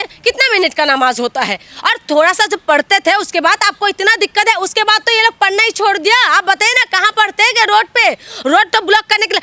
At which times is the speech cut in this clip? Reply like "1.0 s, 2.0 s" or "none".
none